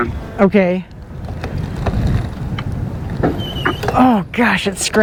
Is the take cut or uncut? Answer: uncut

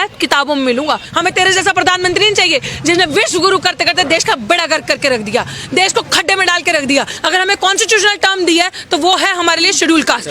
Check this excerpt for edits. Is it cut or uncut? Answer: cut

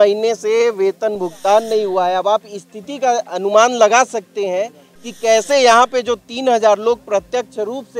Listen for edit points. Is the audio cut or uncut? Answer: uncut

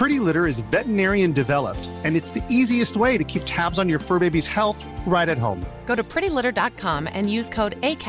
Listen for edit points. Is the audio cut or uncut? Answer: uncut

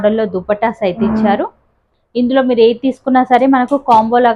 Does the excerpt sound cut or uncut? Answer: uncut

